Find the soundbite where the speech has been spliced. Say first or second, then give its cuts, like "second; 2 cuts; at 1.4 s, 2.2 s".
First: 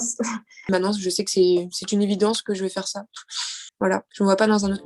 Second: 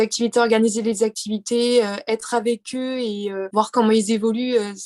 first; 2 cuts; at 0.7 s, 3.8 s